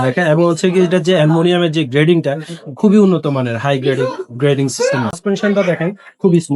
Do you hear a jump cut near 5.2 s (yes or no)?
yes